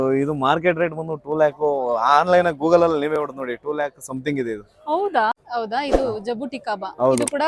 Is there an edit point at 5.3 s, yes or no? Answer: yes